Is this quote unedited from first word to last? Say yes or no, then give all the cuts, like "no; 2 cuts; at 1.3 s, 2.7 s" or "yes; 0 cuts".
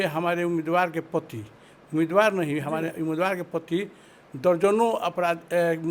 yes; 0 cuts